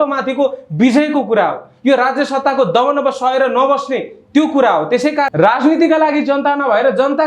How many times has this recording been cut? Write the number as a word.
one